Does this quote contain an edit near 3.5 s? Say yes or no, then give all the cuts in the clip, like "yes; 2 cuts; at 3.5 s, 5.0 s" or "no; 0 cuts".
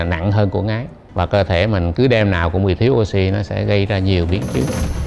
no; 1 cut; at 1.0 s